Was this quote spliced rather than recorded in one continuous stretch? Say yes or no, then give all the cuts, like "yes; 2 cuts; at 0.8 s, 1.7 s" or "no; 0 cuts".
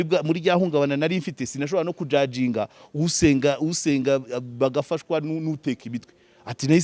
no; 0 cuts